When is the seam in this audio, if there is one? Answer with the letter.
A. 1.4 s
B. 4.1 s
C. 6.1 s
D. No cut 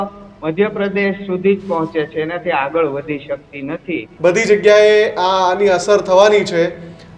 B